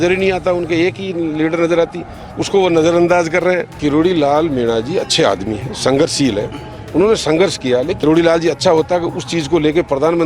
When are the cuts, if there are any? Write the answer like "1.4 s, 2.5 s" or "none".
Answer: 3.8 s, 8.0 s